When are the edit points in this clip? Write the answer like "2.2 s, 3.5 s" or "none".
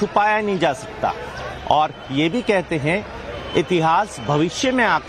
none